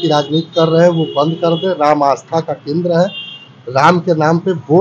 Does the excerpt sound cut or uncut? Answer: uncut